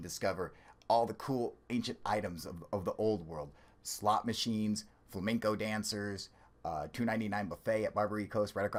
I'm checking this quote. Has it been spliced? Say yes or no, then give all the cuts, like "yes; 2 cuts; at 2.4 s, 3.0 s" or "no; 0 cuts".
no; 0 cuts